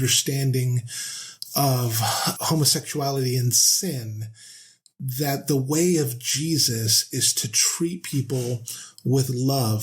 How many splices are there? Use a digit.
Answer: 1